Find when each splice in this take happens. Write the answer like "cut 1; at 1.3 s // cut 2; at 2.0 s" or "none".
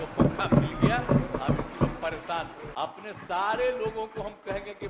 cut 1; at 2.6 s